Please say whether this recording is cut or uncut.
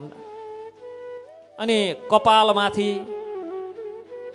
cut